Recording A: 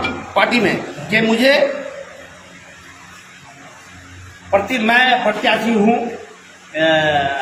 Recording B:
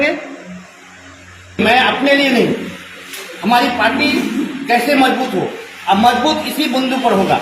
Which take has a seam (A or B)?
B